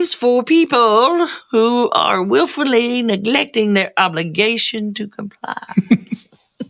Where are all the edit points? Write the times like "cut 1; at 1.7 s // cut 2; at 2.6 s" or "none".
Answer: cut 1; at 5.6 s